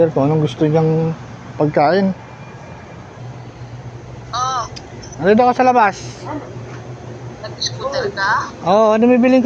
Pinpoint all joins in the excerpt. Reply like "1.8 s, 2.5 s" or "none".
3.2 s